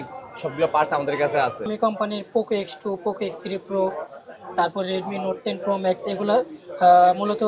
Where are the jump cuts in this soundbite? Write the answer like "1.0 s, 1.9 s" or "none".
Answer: 1.7 s